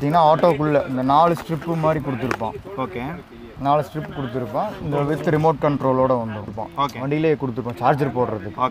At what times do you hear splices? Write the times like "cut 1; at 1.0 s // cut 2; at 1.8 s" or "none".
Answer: cut 1; at 6.6 s